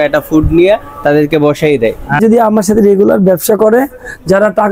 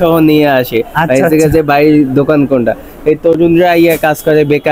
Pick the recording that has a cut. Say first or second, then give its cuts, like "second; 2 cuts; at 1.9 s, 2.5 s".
first; 1 cut; at 2.2 s